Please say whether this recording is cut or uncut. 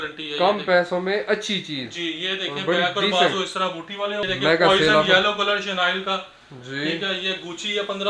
cut